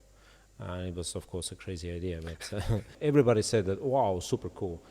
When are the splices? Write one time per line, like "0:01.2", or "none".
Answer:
0:02.9